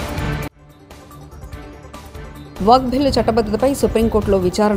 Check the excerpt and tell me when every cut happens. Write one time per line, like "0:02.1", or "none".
0:02.6